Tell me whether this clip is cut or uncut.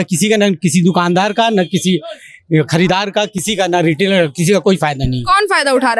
uncut